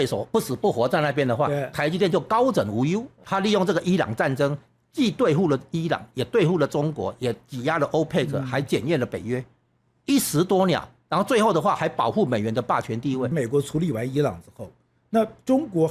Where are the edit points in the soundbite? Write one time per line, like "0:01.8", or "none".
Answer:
0:03.2
0:13.3